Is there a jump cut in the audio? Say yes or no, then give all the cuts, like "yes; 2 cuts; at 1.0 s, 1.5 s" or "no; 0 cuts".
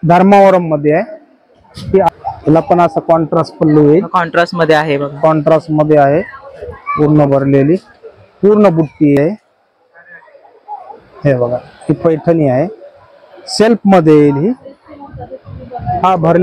yes; 2 cuts; at 2.1 s, 9.2 s